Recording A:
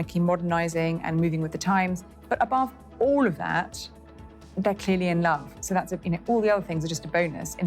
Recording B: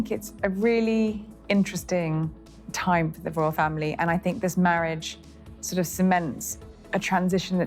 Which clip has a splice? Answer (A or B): A